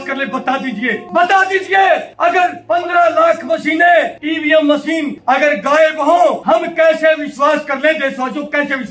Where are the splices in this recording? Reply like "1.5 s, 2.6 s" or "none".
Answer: 1.0 s, 2.4 s, 4.2 s, 5.1 s, 6.4 s